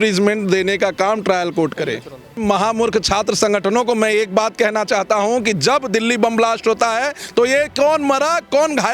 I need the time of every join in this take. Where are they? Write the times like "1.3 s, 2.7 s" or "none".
2.4 s